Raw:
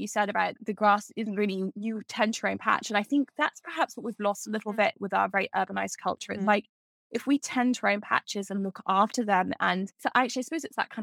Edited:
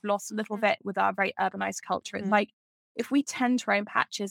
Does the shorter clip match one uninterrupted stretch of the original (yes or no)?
yes